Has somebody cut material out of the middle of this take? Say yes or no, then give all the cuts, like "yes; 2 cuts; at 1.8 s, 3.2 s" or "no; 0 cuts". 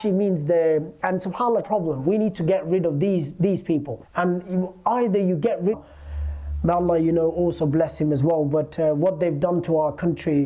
yes; 2 cuts; at 1.7 s, 5.8 s